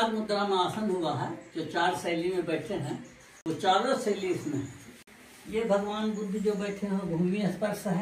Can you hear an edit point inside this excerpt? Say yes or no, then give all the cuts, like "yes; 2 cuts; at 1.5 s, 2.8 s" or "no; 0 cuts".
no; 0 cuts